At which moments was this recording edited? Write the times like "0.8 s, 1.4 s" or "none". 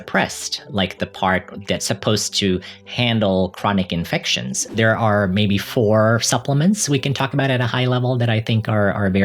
4.8 s